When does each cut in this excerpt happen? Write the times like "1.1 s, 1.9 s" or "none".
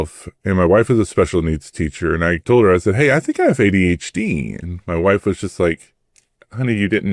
2.4 s